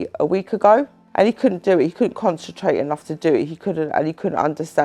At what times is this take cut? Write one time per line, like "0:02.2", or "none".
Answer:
0:01.0